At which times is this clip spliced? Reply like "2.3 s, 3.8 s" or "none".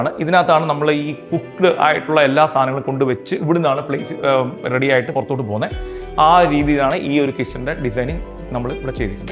none